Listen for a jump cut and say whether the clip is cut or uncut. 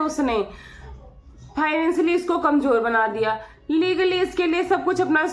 uncut